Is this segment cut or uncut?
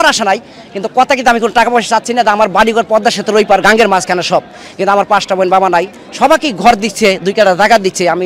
uncut